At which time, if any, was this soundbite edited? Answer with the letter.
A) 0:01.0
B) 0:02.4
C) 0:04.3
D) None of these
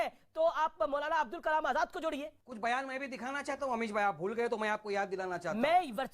B